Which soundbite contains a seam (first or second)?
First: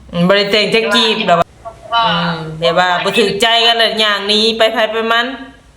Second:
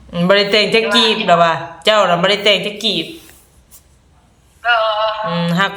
first